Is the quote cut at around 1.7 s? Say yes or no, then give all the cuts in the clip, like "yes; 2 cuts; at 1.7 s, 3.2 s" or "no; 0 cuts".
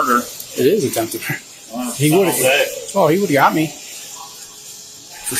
no; 0 cuts